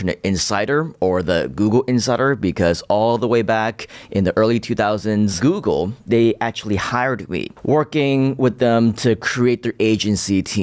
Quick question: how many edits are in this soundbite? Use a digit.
2